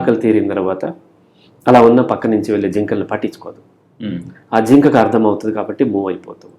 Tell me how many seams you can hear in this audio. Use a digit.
0